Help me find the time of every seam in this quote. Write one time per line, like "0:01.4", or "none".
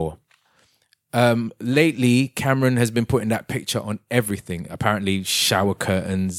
none